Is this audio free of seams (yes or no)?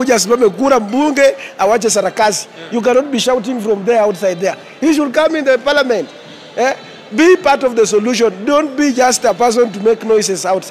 yes